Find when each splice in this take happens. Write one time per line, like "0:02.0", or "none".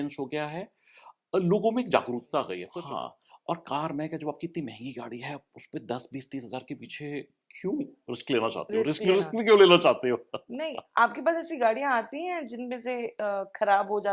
0:02.6